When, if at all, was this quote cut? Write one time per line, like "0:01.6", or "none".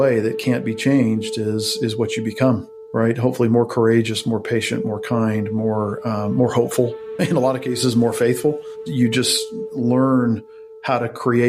none